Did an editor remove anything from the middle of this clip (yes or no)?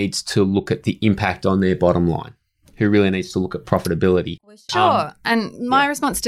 yes